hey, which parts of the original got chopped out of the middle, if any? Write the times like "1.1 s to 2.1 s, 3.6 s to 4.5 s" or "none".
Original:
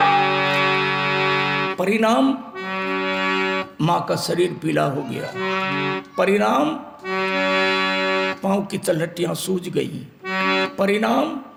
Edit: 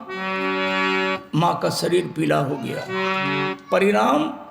none